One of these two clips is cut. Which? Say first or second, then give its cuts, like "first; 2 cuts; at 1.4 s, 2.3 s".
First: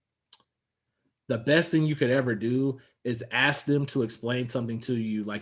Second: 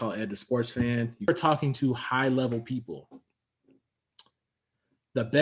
second; 1 cut; at 1.3 s